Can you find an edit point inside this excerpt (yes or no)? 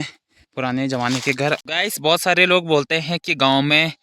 yes